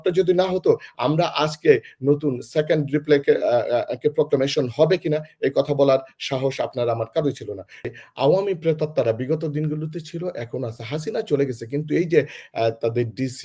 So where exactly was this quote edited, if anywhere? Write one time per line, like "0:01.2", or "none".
0:07.9